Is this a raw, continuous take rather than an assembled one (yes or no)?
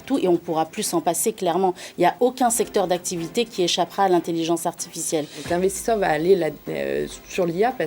no